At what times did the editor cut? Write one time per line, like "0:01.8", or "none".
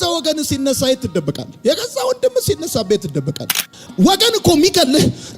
0:03.7